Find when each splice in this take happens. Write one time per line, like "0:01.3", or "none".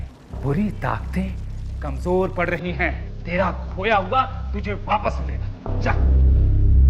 none